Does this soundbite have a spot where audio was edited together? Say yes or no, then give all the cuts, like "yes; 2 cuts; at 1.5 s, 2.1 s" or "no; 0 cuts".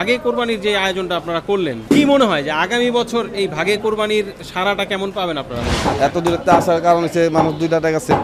yes; 2 cuts; at 1.8 s, 5.7 s